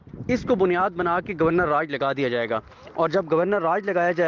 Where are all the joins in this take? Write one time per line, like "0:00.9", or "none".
none